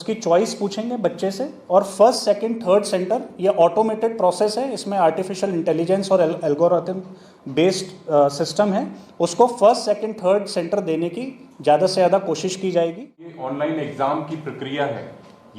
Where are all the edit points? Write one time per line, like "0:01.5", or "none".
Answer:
0:13.3